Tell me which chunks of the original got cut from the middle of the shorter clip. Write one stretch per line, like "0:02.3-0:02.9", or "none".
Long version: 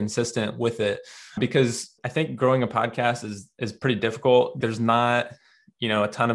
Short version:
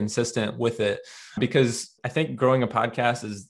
none